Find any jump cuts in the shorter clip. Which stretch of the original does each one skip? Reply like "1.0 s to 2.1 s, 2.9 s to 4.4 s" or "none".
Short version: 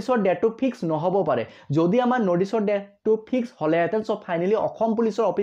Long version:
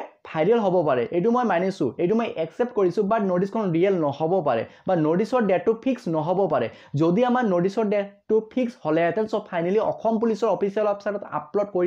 none